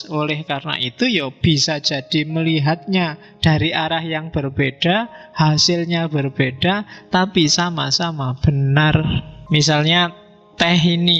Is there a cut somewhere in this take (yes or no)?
yes